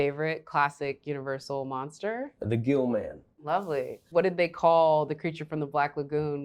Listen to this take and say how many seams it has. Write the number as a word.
two